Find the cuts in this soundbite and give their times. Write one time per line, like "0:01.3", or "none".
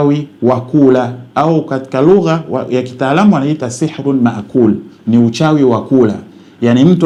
none